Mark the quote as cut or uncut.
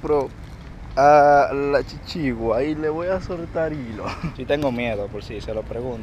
cut